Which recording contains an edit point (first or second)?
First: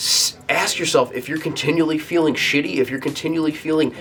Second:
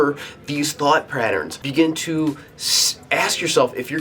second